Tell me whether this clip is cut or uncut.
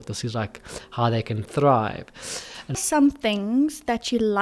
cut